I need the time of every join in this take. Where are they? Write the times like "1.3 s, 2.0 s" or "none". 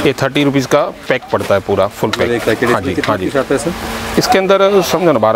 none

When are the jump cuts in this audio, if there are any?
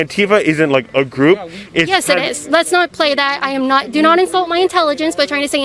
none

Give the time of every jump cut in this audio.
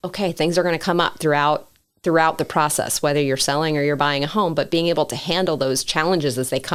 none

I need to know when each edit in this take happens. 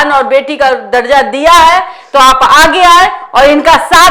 none

